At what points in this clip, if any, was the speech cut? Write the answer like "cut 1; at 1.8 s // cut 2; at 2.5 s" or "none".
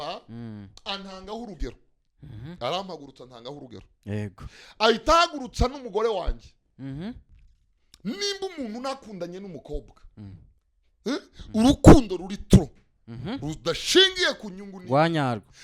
cut 1; at 7.3 s